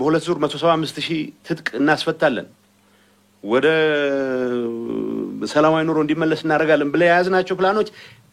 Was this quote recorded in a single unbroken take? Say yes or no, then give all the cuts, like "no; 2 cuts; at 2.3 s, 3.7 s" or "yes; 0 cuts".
yes; 0 cuts